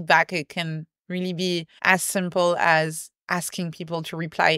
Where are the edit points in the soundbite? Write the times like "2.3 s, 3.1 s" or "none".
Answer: 1.7 s, 3.1 s